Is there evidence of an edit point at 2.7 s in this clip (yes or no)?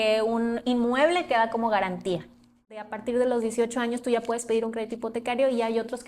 yes